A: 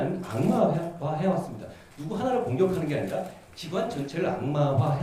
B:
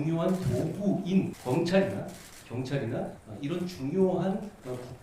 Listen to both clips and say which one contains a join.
B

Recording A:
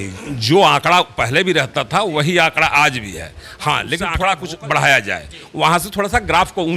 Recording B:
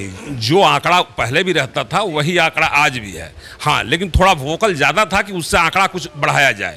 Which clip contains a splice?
A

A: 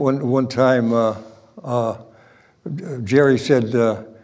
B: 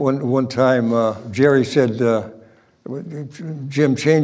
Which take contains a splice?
B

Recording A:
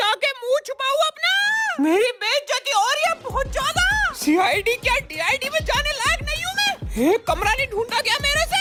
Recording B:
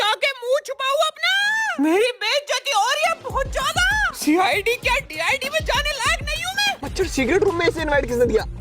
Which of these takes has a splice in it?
B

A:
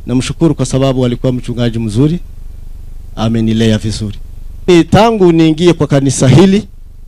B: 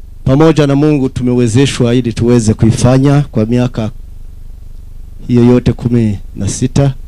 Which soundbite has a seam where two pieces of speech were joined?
A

